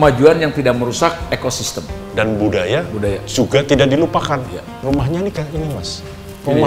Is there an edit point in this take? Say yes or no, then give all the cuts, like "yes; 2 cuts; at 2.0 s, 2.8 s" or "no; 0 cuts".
yes; 2 cuts; at 2.0 s, 4.6 s